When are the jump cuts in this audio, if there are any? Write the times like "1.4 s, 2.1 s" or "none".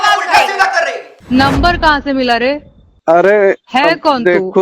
1.1 s